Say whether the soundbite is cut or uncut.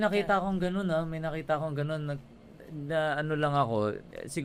uncut